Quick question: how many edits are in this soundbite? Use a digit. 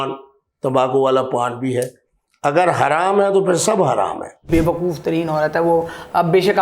1